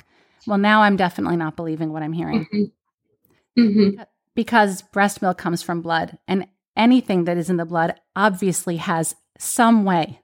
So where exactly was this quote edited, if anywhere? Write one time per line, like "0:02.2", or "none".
none